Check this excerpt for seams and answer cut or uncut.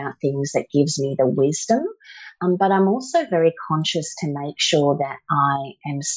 uncut